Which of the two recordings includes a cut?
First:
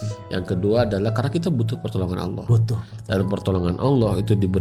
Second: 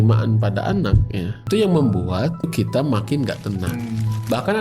second; 3 cuts; at 1.5 s, 2.5 s, 3.7 s

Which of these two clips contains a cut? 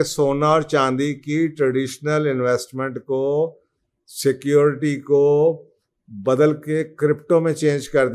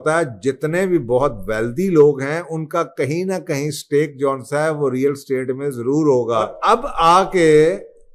second; 1 cut; at 6.5 s

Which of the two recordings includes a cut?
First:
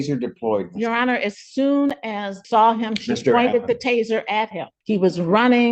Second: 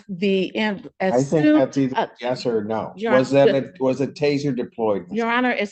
first; 2 cuts; at 2.3 s, 4.7 s

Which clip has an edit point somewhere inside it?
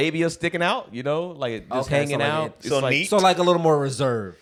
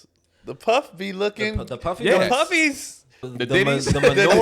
second; 1 cut; at 3.3 s

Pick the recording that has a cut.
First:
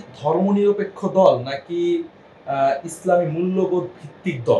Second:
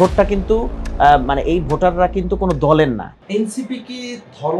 second; 1 cut; at 3.2 s

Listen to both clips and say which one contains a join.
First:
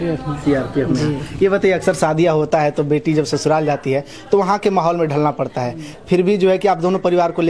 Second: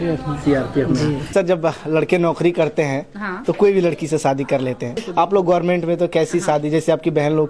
second; 2 cuts; at 1.3 s, 5.0 s

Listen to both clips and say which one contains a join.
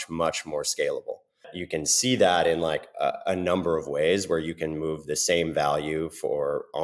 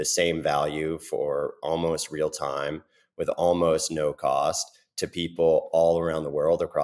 first; 1 cut; at 1.6 s

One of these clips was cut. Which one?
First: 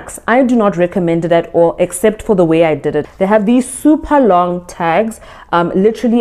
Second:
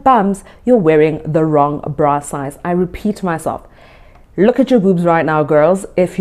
first; 1 cut; at 3.1 s

